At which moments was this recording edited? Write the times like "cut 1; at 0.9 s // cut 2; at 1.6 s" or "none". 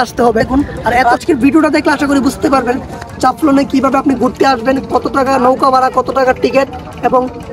cut 1; at 1.0 s